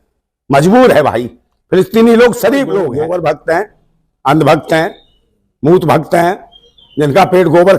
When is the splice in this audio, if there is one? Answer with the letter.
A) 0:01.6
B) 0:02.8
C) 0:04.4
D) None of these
B